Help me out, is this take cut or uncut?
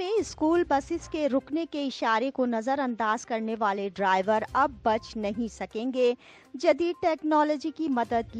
uncut